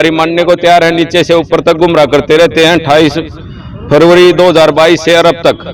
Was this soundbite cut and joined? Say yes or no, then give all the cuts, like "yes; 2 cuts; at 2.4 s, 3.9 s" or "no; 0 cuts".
no; 0 cuts